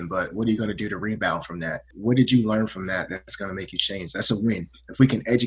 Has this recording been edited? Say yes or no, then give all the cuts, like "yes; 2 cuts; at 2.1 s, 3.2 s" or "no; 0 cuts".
yes; 1 cut; at 1.9 s